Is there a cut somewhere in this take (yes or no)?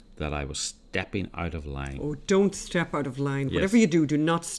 no